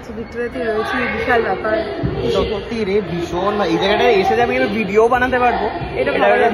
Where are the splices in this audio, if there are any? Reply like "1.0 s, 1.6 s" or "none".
none